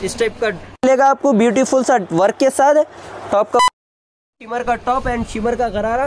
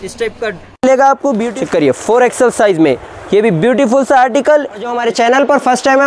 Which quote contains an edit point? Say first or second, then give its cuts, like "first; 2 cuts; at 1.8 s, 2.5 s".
second; 2 cuts; at 1.5 s, 5.0 s